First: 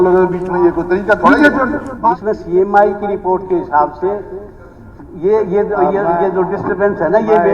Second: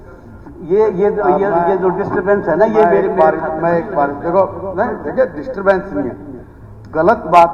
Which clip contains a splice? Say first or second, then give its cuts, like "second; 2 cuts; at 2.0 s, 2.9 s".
first; 1 cut; at 1.8 s